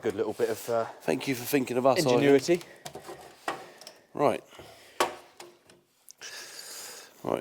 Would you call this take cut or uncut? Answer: uncut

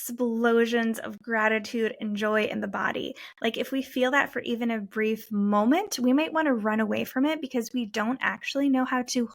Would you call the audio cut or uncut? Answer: uncut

